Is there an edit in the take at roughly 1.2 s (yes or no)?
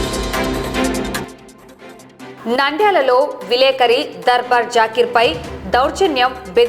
yes